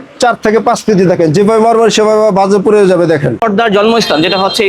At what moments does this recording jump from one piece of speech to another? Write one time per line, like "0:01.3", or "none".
0:03.4

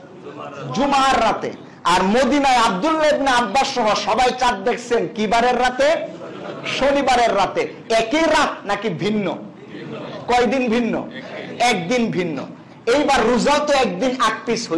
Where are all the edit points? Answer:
none

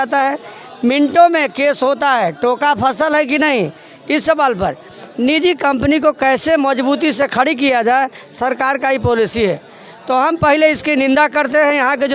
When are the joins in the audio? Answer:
none

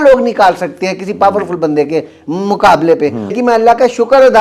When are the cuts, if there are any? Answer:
0:03.3

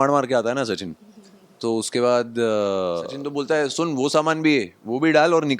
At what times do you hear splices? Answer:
0:03.2

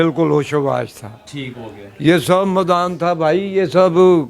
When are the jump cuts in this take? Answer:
none

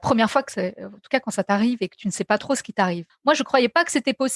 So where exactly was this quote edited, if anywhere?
0:03.1

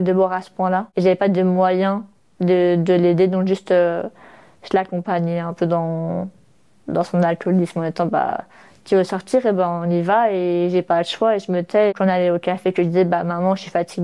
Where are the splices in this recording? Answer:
0:00.9
0:11.9

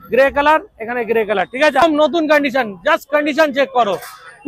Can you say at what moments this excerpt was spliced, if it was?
0:01.8

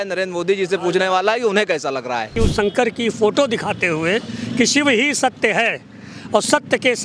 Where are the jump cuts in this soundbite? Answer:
0:02.3

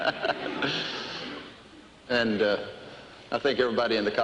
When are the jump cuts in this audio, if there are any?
0:02.5

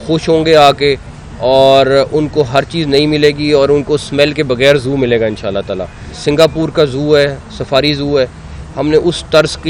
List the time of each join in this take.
0:06.1

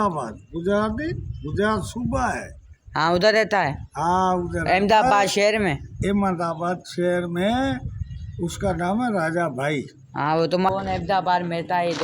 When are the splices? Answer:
0:10.7

